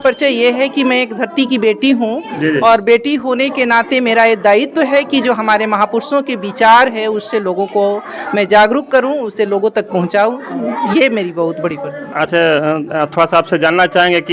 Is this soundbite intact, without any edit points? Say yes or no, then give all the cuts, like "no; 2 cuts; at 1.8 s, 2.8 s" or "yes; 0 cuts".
yes; 0 cuts